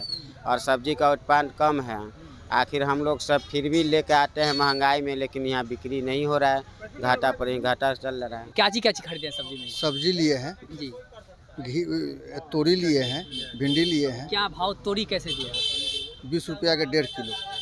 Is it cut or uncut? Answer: cut